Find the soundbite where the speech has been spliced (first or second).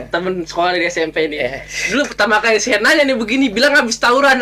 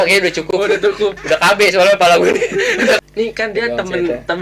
second